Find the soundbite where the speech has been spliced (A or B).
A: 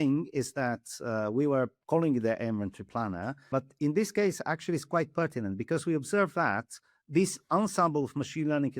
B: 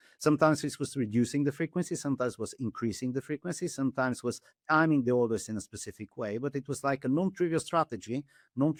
A